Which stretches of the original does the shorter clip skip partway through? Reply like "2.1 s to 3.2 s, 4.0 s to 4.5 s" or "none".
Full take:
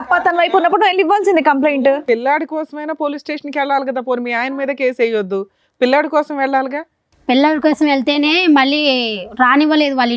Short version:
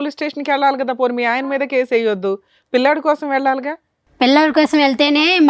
none